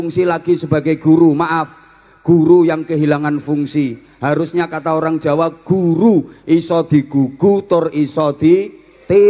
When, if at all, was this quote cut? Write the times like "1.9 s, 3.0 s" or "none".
none